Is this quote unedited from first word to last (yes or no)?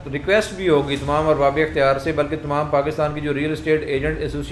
yes